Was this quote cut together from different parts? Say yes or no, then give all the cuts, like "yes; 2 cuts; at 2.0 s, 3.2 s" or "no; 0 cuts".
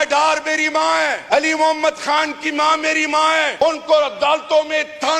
yes; 2 cuts; at 1.2 s, 3.5 s